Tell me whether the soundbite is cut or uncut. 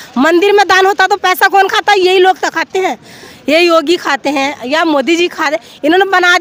uncut